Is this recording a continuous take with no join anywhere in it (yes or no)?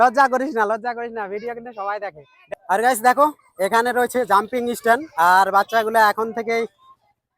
no